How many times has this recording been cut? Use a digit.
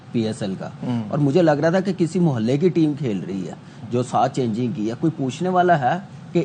0